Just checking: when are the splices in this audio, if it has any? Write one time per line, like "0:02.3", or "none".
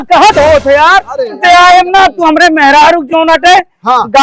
0:01.4